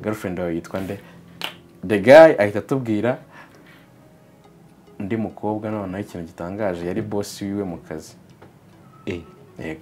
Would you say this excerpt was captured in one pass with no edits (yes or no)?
yes